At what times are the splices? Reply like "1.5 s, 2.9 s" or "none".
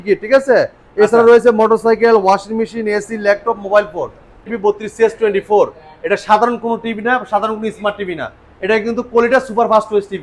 4.5 s